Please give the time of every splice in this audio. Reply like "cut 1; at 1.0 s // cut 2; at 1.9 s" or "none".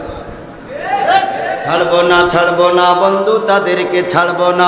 cut 1; at 1.6 s